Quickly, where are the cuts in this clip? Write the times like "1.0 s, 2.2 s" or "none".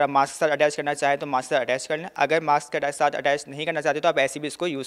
none